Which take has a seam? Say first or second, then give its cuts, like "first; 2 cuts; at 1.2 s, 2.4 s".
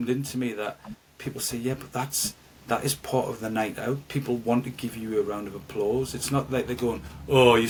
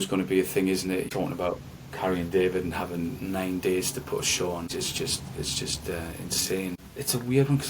second; 3 cuts; at 1.1 s, 4.7 s, 6.9 s